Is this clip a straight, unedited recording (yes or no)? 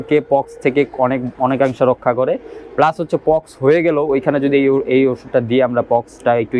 yes